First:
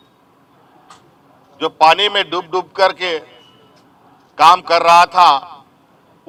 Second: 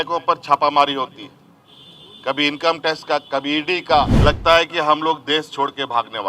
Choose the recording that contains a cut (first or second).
second